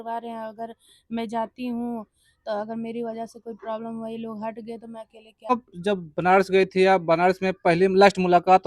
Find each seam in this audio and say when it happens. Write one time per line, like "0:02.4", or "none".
0:05.5